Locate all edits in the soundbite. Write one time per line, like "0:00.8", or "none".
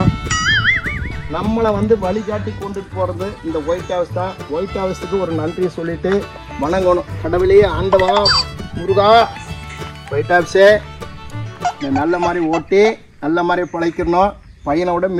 none

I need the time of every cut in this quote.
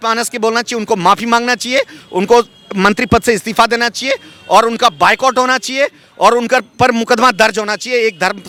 none

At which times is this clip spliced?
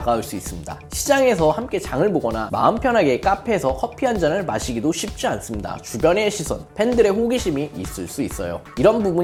none

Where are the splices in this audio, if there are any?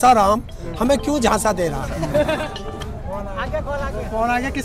0:02.4

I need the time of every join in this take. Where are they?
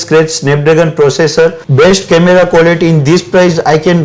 0:01.6

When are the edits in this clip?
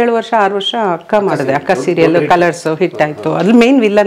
none

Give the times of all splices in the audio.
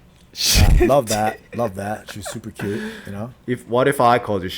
0:03.4

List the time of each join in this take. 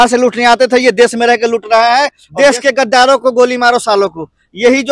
0:02.2

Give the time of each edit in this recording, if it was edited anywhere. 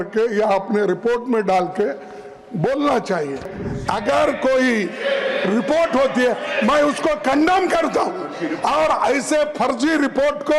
0:03.6

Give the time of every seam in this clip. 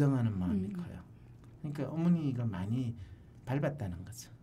none

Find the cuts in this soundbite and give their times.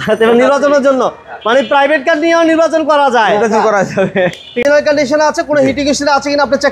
0:04.6

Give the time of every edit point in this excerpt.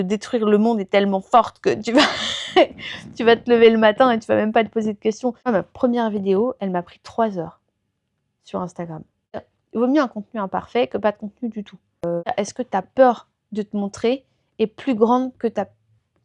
0:05.5
0:09.5
0:12.3

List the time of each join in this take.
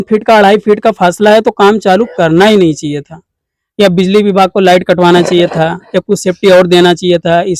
none

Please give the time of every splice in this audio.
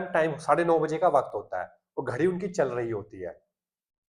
none

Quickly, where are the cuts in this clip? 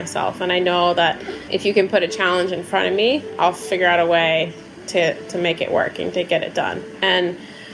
0:01.4

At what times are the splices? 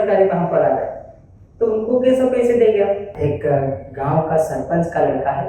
0:03.1

